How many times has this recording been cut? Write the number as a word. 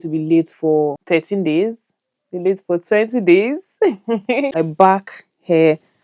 two